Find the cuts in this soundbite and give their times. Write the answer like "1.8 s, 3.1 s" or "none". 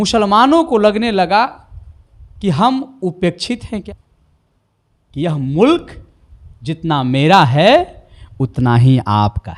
3.9 s